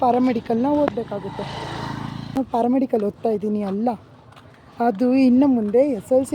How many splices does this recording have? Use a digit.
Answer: 1